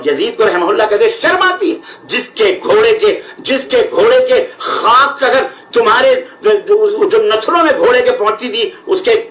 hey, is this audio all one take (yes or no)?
yes